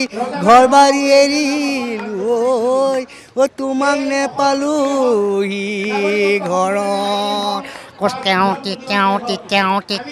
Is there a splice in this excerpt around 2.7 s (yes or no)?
no